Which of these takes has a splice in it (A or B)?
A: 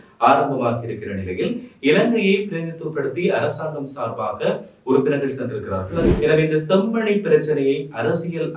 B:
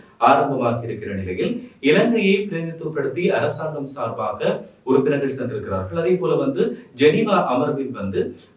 A